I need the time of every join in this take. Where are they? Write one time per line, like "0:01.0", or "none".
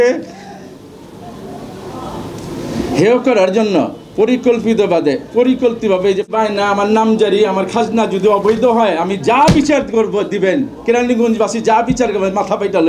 0:06.3

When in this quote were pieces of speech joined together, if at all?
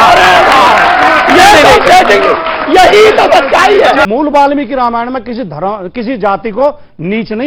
0:04.1

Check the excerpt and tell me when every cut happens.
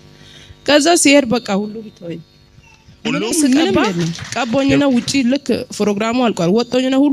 0:04.2

